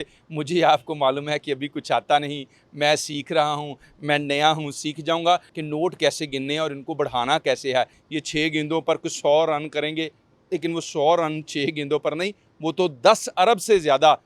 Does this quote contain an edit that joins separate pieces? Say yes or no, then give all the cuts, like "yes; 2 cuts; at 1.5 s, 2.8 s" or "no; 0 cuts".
yes; 2 cuts; at 5.5 s, 8.0 s